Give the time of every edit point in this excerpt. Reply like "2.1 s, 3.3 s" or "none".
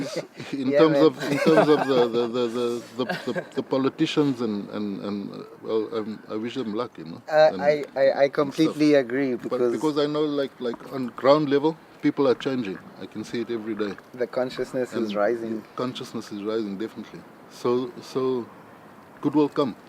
11.2 s